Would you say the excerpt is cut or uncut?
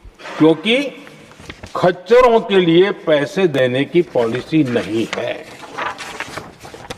uncut